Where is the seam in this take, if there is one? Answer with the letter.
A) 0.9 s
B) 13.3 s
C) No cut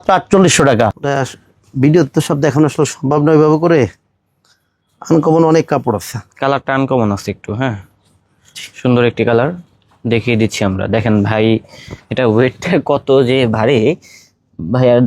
A